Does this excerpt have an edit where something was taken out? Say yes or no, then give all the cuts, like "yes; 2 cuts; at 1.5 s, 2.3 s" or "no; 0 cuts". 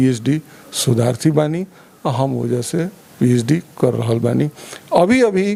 no; 0 cuts